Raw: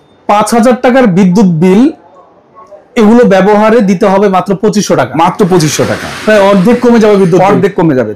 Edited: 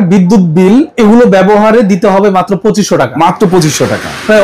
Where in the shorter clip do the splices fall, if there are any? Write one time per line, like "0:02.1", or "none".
0:00.9